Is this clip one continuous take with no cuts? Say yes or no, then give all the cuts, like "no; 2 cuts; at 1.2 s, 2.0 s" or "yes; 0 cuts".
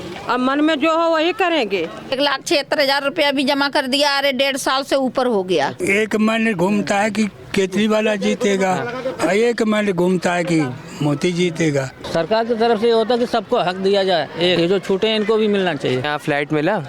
no; 5 cuts; at 2.1 s, 5.8 s, 11.9 s, 14.6 s, 16.0 s